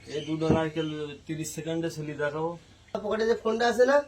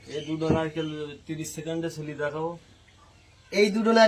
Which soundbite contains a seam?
first; 1 cut; at 3.0 s

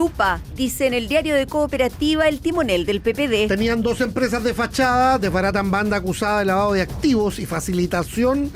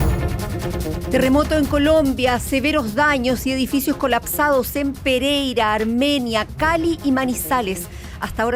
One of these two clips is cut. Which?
second; 1 cut; at 1.1 s

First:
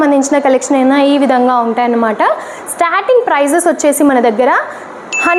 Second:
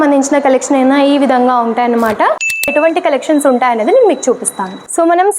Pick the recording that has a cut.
second; 1 cut; at 2.5 s

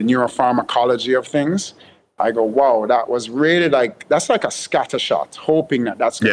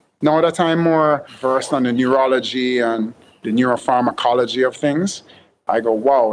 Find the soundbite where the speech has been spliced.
second; 1 cut; at 1.3 s

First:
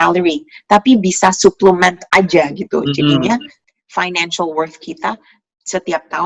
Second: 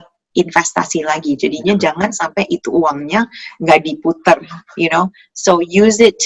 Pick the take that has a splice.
first; 1 cut; at 3.6 s

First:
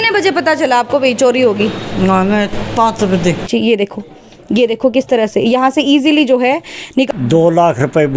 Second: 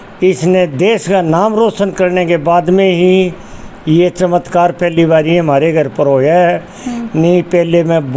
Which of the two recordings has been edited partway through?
first; 2 cuts; at 3.5 s, 7.1 s

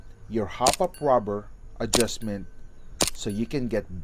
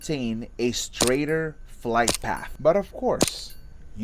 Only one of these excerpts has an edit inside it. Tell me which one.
second; 1 cut; at 2.5 s

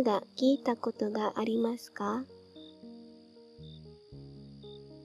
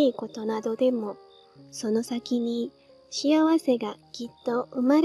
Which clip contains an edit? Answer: first; 2 cuts; at 2.3 s, 3.9 s

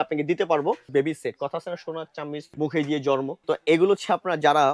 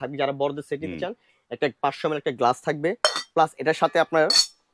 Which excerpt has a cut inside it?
first; 3 cuts; at 0.9 s, 2.5 s, 3.4 s

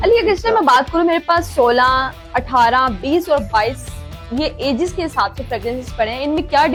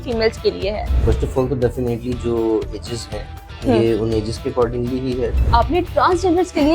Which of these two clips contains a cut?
second; 2 cuts; at 0.9 s, 5.4 s

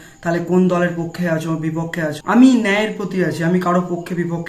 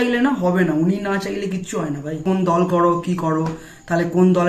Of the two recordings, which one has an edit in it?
second; 1 cut; at 2.2 s

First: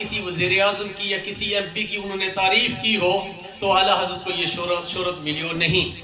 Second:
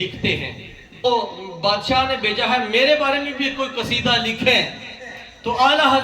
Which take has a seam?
second; 1 cut; at 1.0 s

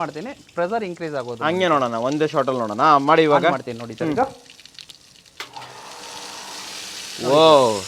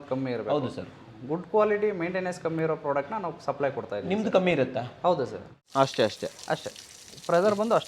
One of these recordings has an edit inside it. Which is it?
second; 1 cut; at 5.6 s

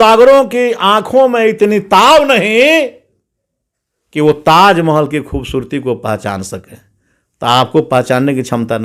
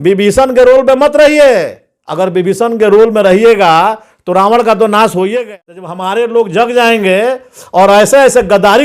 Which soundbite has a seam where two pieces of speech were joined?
second; 1 cut; at 5.4 s

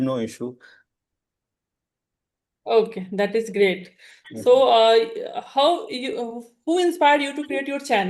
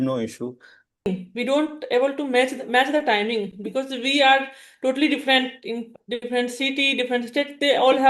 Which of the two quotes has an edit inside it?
second; 1 cut; at 1.1 s

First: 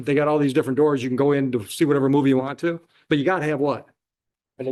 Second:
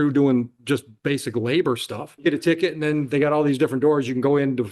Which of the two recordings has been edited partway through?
second; 1 cut; at 2.1 s

